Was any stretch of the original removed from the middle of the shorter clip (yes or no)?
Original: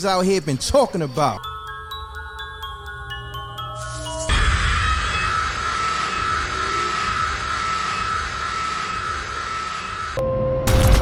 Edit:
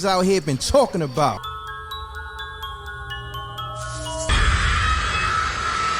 no